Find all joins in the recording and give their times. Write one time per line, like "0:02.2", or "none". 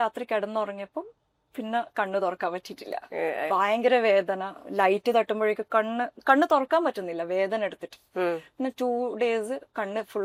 none